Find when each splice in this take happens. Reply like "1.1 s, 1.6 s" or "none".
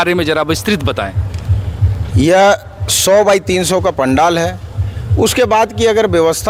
none